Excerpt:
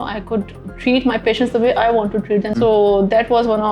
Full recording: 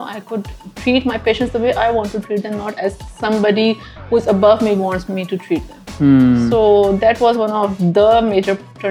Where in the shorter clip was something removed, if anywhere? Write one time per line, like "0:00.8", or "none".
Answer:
0:02.6